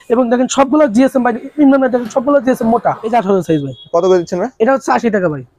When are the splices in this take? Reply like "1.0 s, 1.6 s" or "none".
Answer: 3.0 s